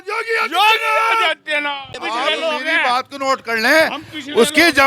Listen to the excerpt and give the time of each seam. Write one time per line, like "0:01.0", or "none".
0:02.0